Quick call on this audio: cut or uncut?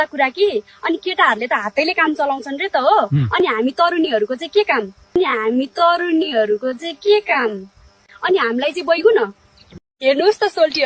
cut